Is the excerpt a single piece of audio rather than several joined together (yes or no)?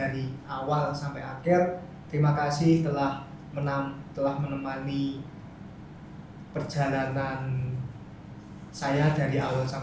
yes